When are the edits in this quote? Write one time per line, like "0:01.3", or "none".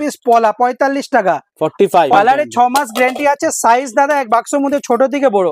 0:02.2